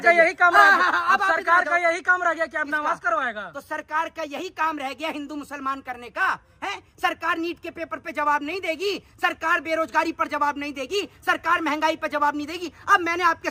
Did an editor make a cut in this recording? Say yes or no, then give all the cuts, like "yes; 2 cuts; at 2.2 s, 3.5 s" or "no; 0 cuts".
no; 0 cuts